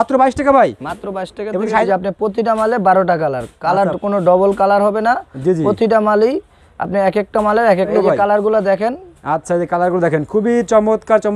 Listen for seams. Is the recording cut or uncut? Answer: cut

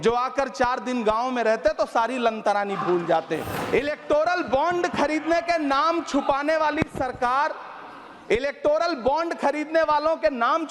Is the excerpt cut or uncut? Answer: cut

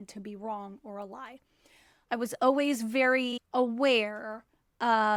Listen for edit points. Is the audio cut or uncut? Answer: uncut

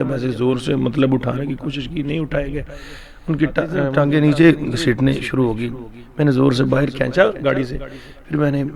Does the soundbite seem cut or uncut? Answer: uncut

